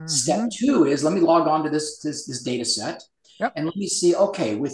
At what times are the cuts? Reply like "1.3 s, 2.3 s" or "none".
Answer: none